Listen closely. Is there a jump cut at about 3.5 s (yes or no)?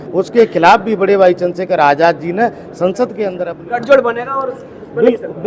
yes